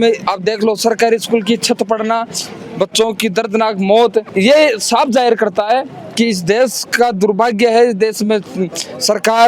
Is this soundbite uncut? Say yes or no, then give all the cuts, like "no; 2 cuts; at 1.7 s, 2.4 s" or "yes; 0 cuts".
yes; 0 cuts